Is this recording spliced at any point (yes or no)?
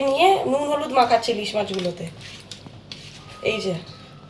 no